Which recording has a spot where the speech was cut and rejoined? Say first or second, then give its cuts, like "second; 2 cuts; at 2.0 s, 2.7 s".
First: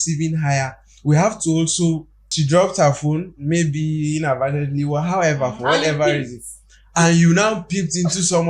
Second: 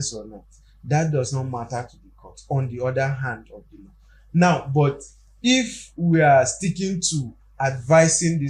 first; 1 cut; at 2.1 s